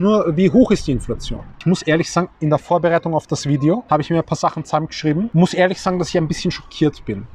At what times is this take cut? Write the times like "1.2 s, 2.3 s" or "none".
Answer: 1.6 s, 3.8 s, 5.3 s